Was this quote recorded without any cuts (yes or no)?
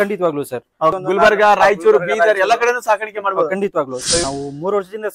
no